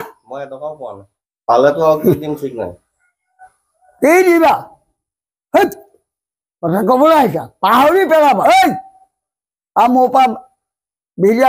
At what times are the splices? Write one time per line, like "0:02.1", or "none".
none